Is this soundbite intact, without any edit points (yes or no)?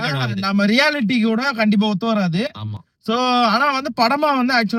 yes